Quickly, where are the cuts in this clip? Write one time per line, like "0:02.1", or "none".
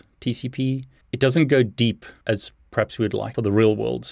0:02.1
0:03.3